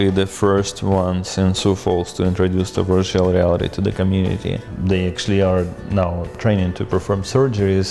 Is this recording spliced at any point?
yes; 2 cuts; at 4.7 s, 6.4 s

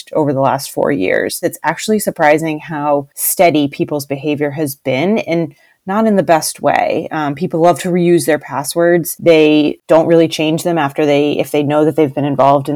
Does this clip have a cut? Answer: yes; 4 cuts; at 1.5 s, 3.2 s, 9.1 s, 9.8 s

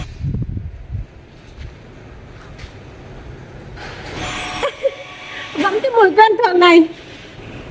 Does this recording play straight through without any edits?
yes; 0 cuts

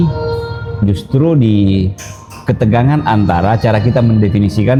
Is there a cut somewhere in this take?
no; 0 cuts

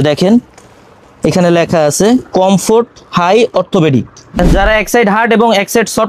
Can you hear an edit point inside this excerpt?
yes; 1 cut; at 4.2 s

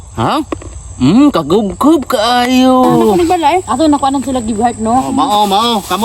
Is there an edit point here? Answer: yes; 1 cut; at 3.1 s

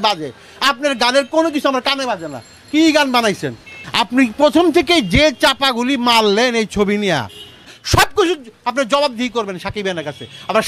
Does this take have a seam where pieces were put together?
yes; 2 cuts; at 3.8 s, 7.7 s

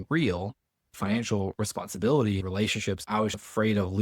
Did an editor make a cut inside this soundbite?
yes; 1 cut; at 3.0 s

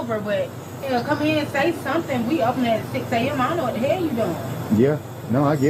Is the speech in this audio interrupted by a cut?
no; 0 cuts

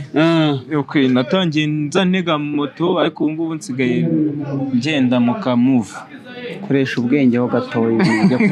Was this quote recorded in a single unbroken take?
yes; 0 cuts

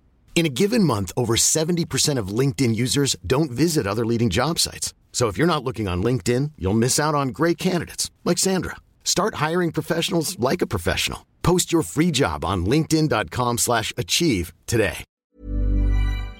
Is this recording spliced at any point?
yes; 1 cut; at 15.1 s

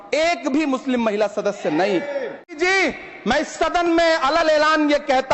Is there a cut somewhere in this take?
yes; 1 cut; at 2.6 s

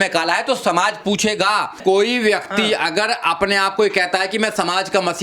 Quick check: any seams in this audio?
yes; 1 cut; at 1.7 s

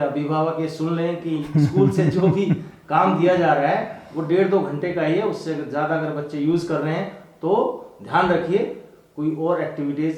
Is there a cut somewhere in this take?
no; 0 cuts

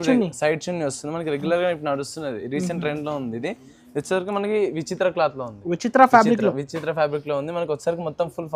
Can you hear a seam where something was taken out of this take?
no; 0 cuts

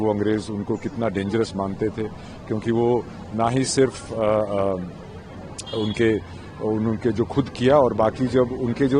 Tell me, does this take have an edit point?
no; 0 cuts

